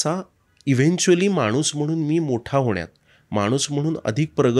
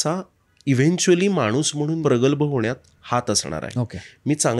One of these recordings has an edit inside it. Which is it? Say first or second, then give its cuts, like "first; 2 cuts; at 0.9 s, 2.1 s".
second; 1 cut; at 2.0 s